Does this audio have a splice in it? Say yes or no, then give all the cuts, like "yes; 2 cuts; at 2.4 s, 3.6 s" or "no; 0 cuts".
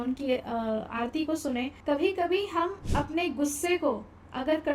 yes; 1 cut; at 1.8 s